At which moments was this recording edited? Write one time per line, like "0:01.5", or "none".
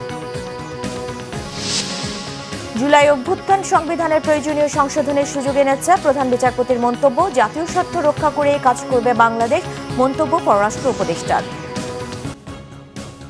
0:12.4